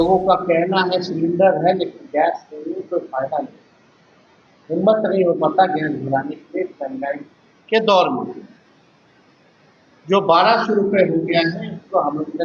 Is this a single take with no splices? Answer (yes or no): yes